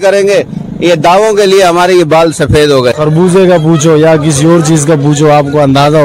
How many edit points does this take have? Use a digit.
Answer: 1